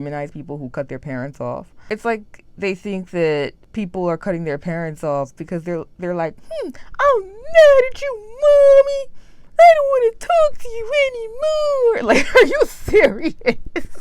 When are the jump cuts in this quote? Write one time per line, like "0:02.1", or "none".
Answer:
0:01.7
0:03.6